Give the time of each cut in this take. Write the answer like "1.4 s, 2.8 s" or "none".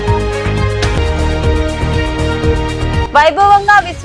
0.9 s